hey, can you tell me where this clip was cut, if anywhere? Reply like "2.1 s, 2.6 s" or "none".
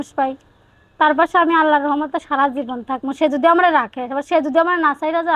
none